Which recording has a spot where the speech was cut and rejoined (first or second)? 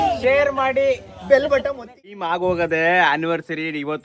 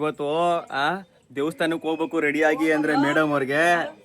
first